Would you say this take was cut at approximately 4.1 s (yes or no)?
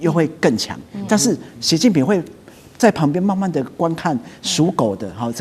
no